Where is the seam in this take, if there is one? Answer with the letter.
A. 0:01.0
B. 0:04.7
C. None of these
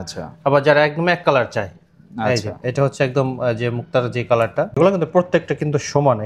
B